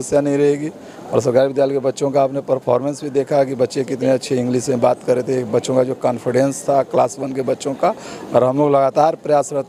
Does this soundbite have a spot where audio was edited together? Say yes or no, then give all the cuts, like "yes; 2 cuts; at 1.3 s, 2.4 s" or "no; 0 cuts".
no; 0 cuts